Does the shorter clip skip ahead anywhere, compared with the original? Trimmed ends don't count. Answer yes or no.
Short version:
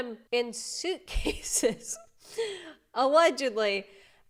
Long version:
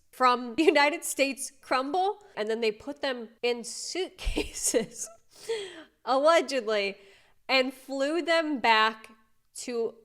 no